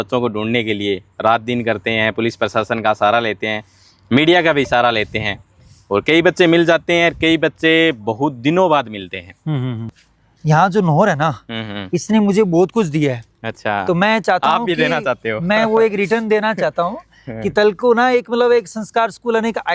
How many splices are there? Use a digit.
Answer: 1